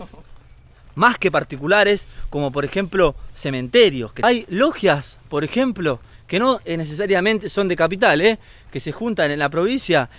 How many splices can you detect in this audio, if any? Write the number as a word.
one